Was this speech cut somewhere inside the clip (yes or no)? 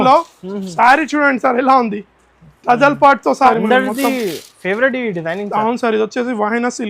yes